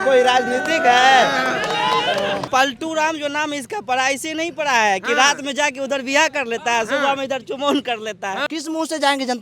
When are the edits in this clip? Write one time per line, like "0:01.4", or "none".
0:02.5
0:08.5